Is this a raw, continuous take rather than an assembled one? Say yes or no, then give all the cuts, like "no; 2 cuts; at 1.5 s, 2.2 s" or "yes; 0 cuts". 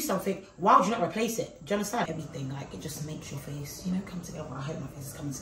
no; 1 cut; at 2.0 s